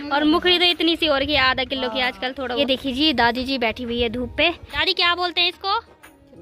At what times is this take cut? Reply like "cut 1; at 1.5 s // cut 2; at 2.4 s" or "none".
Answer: cut 1; at 2.6 s // cut 2; at 4.8 s